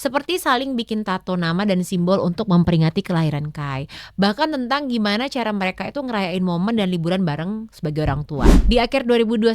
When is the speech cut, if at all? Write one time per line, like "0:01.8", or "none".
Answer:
0:08.6